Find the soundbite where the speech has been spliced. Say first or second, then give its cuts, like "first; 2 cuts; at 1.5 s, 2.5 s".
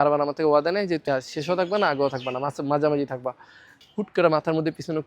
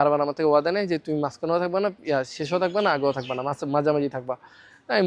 first; 2 cuts; at 1.0 s, 3.7 s